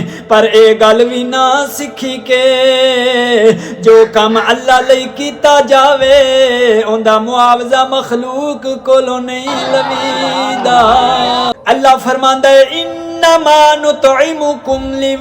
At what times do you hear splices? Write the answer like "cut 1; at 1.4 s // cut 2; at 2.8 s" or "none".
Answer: cut 1; at 11.5 s

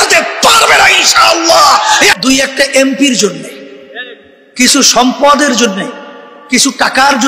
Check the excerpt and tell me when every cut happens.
cut 1; at 2.2 s

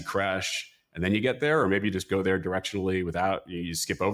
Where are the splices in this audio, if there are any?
none

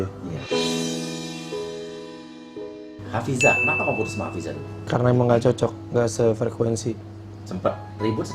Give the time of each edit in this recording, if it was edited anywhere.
cut 1; at 2.9 s // cut 2; at 4.9 s

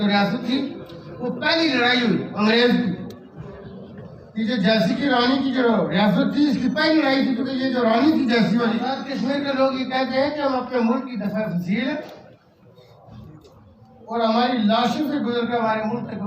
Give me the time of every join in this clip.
cut 1; at 9.0 s

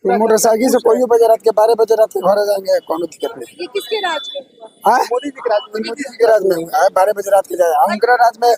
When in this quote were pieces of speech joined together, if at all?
none

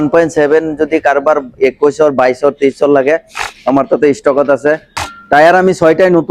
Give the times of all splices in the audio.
cut 1; at 5.0 s

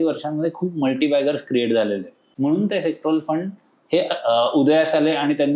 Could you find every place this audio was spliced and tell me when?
cut 1; at 2.2 s

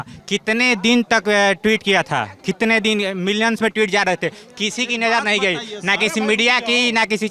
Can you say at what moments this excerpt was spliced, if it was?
none

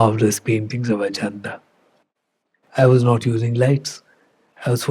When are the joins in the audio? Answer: cut 1; at 2.5 s

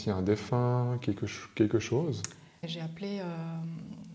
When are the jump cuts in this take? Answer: cut 1; at 2.6 s

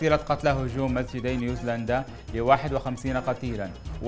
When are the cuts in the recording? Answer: none

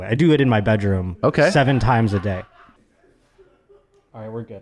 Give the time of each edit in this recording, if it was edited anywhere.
cut 1; at 2.8 s

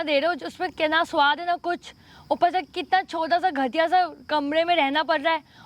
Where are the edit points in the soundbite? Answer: none

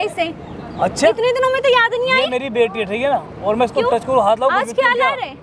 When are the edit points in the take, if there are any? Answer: none

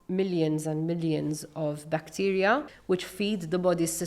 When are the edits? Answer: cut 1; at 2.7 s

